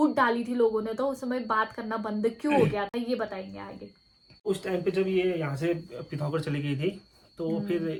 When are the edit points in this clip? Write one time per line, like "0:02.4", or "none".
none